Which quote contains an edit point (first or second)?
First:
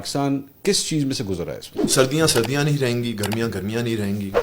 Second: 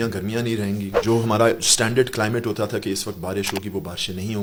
first